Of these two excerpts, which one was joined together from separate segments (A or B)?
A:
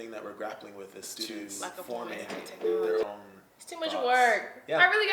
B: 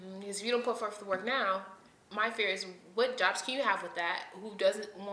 A